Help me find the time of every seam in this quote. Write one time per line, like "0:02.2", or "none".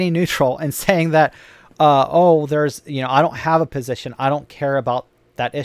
none